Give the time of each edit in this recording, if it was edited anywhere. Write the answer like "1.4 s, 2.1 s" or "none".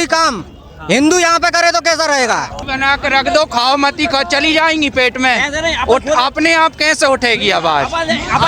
2.6 s